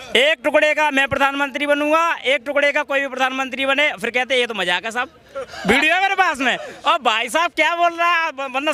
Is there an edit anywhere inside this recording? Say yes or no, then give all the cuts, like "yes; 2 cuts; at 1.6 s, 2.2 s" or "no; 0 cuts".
no; 0 cuts